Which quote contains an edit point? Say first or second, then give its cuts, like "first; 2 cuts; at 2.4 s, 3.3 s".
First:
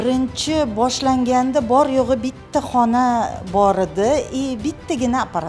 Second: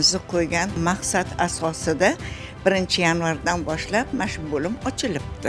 second; 2 cuts; at 0.8 s, 4.1 s